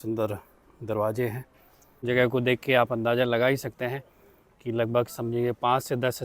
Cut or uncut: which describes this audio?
cut